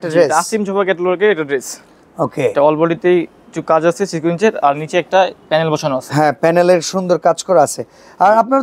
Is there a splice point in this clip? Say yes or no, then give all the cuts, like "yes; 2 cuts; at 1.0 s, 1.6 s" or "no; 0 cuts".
no; 0 cuts